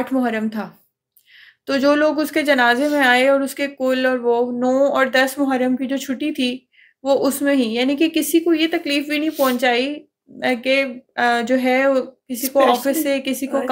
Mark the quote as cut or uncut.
uncut